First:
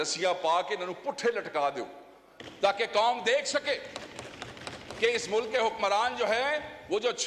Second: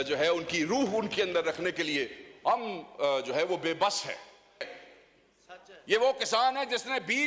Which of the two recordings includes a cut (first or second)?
second